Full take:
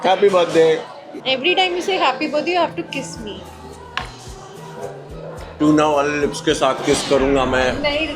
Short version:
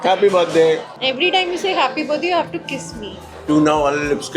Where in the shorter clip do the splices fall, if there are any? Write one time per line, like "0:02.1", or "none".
0:00.9
0:03.3